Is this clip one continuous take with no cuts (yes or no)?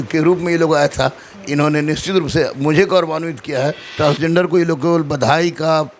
no